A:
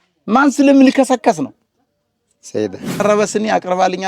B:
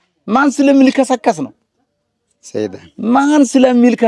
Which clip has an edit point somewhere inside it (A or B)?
A